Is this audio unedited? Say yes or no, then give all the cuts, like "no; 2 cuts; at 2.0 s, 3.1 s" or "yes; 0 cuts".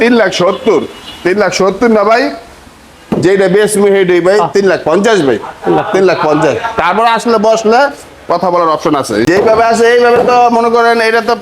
no; 1 cut; at 9.3 s